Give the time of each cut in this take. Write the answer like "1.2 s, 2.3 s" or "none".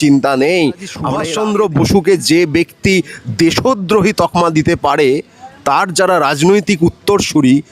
1.2 s